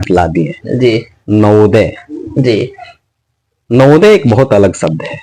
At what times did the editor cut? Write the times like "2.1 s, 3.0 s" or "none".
none